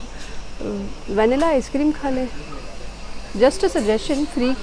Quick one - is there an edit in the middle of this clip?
no; 0 cuts

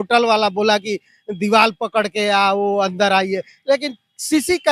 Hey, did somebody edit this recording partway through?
no; 0 cuts

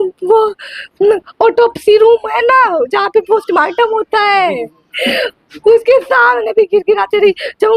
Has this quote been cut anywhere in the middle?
no; 0 cuts

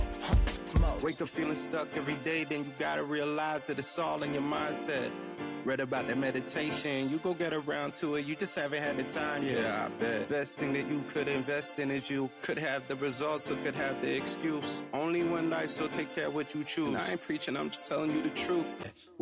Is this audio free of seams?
yes; 0 cuts

